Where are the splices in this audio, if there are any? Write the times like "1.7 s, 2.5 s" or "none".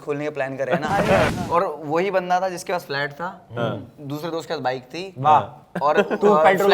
1.3 s